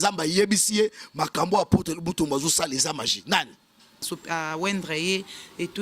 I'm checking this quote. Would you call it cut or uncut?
cut